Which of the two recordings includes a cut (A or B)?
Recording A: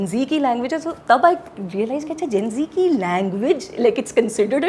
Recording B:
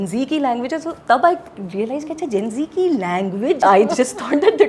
B